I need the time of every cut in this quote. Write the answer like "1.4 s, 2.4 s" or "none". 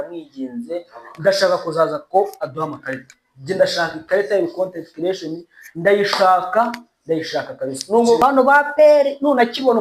8.2 s